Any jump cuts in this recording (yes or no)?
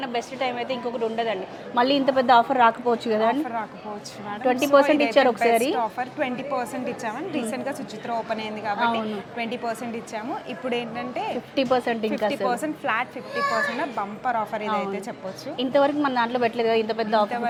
no